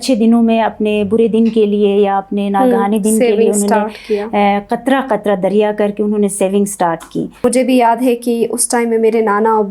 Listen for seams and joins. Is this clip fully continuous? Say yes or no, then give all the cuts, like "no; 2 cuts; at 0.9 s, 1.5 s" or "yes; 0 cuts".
no; 1 cut; at 7.3 s